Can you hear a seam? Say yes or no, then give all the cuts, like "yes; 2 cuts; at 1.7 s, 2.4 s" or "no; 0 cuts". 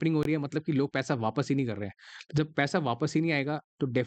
no; 0 cuts